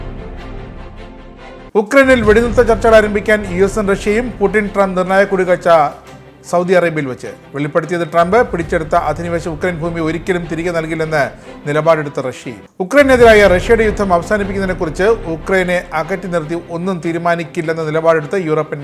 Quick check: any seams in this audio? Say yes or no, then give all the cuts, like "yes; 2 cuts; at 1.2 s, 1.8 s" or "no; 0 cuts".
yes; 1 cut; at 1.0 s